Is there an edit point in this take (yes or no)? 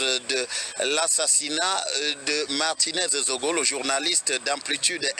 yes